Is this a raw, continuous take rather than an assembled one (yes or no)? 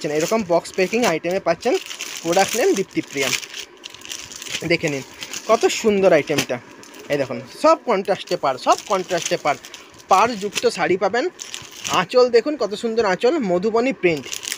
yes